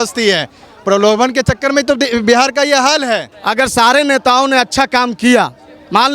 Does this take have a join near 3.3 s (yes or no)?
yes